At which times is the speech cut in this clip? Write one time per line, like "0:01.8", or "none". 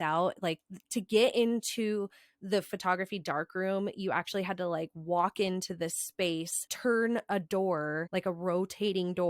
0:06.6
0:08.0